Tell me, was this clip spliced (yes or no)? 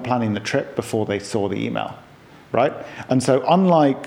no